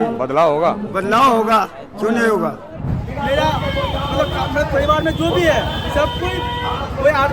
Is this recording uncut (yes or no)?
no